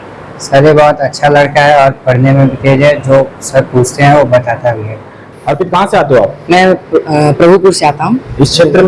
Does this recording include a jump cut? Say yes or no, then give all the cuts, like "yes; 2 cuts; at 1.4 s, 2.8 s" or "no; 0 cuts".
yes; 1 cut; at 5.2 s